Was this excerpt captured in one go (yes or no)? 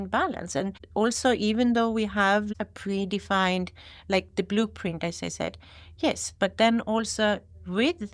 no